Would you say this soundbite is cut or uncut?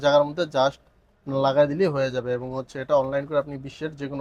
uncut